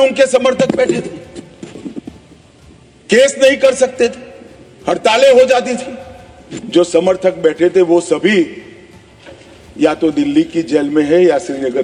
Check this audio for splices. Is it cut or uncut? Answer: uncut